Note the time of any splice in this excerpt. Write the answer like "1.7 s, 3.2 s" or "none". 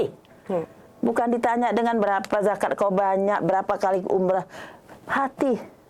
none